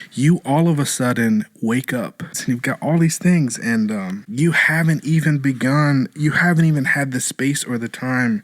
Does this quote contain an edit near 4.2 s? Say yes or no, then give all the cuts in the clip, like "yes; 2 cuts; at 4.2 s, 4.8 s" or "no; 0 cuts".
yes; 2 cuts; at 2.4 s, 4.2 s